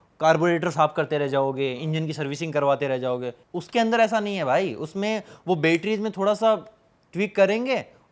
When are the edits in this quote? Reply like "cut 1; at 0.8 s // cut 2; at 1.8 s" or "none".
cut 1; at 3.3 s